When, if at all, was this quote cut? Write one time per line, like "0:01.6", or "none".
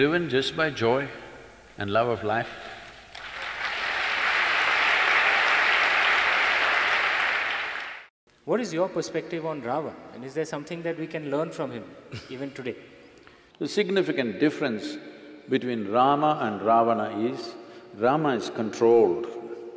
none